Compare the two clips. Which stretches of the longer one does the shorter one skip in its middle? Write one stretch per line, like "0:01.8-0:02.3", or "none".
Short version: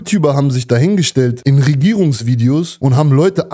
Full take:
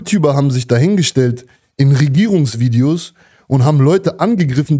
0:01.4-0:01.7
0:03.1-0:03.4